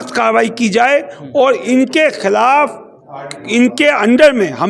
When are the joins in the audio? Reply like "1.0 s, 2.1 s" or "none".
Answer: none